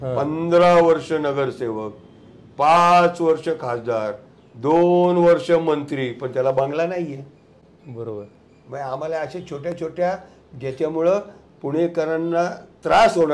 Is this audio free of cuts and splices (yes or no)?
yes